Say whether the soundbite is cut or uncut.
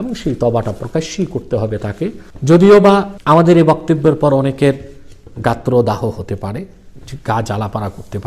cut